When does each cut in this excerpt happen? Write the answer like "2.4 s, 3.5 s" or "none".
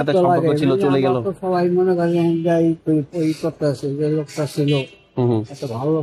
none